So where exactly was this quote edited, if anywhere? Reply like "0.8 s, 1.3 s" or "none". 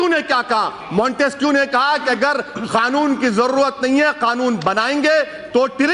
none